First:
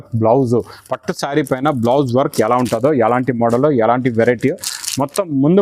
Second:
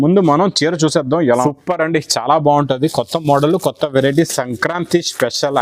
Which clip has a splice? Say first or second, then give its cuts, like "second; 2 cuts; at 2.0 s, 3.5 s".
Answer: second; 1 cut; at 1.3 s